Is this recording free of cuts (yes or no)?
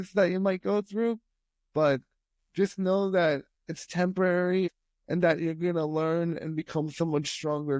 no